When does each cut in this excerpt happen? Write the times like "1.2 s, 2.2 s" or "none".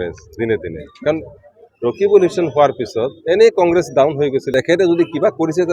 4.5 s